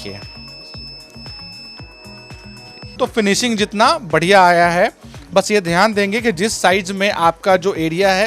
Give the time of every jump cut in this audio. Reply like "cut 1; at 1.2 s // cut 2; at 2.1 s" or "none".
cut 1; at 2.8 s